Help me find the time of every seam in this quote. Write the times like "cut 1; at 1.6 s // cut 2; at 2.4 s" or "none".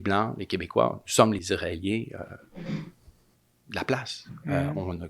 cut 1; at 1.4 s